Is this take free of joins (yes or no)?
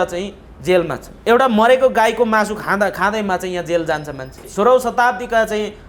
no